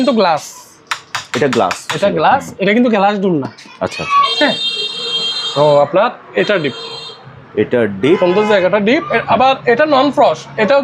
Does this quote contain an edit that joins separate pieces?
no; 0 cuts

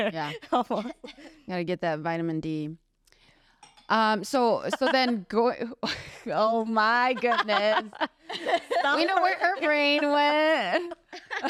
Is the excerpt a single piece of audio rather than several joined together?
yes; 0 cuts

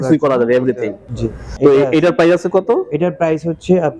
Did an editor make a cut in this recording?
no; 0 cuts

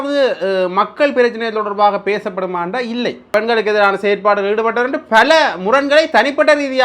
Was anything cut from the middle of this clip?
yes; 1 cut; at 3.2 s

